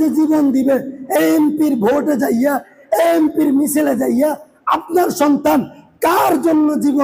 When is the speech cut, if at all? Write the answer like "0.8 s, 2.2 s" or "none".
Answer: none